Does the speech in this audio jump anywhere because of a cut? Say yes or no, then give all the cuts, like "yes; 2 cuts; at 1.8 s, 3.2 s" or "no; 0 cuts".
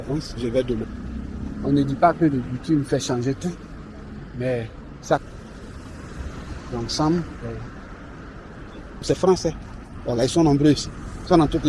yes; 3 cuts; at 0.9 s, 5.2 s, 9.0 s